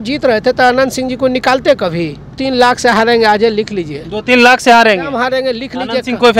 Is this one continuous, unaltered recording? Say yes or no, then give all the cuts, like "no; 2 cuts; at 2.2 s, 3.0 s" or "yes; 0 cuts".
no; 1 cut; at 2.3 s